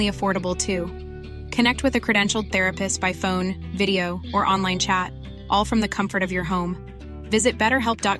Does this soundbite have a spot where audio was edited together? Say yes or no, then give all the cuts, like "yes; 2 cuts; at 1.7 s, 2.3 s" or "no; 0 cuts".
no; 0 cuts